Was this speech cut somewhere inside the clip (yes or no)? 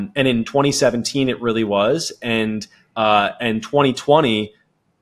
no